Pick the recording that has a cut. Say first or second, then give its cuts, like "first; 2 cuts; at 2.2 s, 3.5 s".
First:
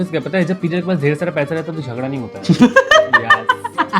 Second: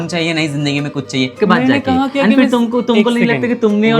second; 1 cut; at 1.4 s